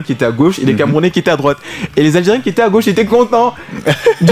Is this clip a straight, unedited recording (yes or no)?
yes